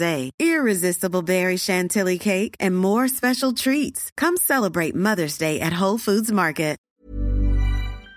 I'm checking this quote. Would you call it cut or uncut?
cut